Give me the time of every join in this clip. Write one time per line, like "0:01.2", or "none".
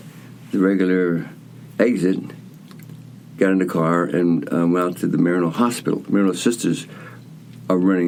none